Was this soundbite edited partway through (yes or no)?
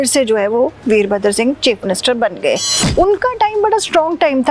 yes